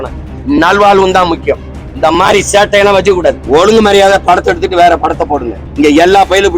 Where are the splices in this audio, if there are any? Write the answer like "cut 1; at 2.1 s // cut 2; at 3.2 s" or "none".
cut 1; at 3.4 s // cut 2; at 5.6 s

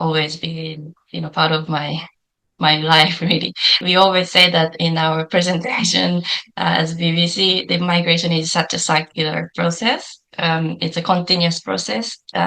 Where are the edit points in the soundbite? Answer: cut 1; at 3.8 s

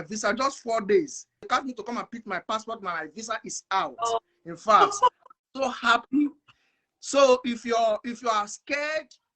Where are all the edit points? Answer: cut 1; at 1.5 s

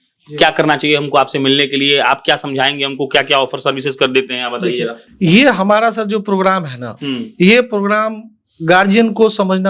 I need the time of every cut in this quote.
none

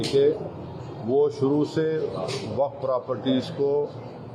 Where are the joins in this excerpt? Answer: none

